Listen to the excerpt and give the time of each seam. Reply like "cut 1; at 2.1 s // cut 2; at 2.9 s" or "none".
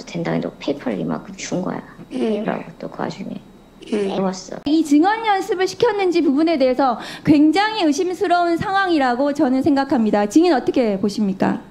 cut 1; at 4.7 s